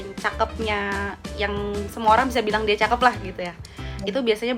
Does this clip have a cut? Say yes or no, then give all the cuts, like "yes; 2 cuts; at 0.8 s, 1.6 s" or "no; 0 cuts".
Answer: no; 0 cuts